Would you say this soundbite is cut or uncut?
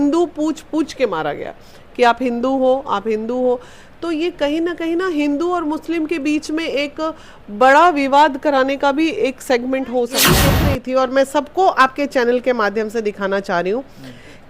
cut